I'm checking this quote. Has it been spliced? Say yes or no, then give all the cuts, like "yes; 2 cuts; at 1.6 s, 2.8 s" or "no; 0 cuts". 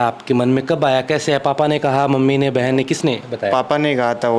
no; 0 cuts